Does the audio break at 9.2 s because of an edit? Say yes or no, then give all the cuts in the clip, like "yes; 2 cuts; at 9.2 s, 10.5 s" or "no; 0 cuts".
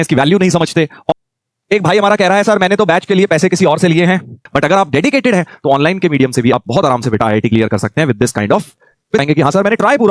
yes; 3 cuts; at 1.1 s, 4.4 s, 9.2 s